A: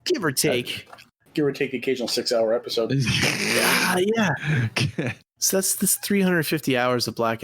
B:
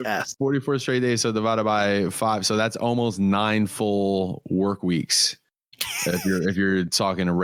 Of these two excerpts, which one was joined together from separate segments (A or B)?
A